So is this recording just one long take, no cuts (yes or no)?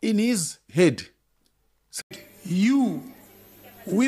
no